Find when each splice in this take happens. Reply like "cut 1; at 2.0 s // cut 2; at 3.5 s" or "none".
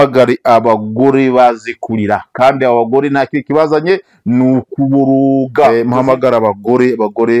cut 1; at 5.7 s